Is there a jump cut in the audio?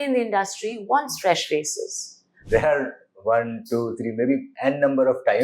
yes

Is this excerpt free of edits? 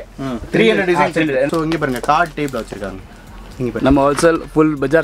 no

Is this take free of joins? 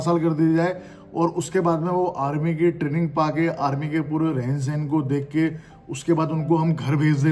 yes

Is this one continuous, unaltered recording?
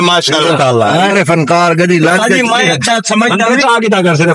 no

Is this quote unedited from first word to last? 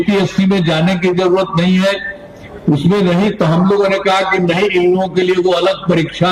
yes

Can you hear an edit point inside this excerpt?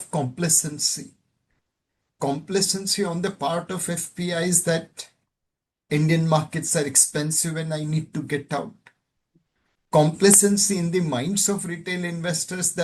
no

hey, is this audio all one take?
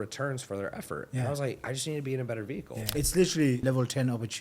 no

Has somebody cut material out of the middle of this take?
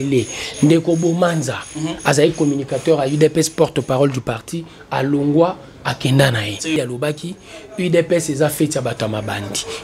yes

